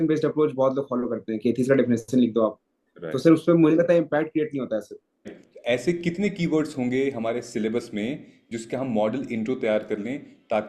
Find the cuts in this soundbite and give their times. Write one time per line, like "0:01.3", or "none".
0:05.4